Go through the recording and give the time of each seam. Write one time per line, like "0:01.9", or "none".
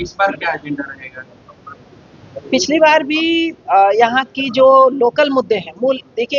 none